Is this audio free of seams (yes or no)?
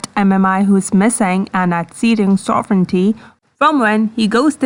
yes